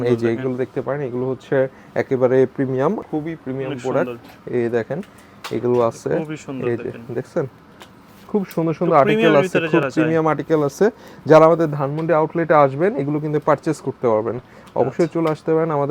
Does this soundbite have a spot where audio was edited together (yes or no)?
no